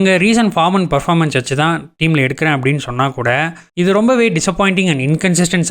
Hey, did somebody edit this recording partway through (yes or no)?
yes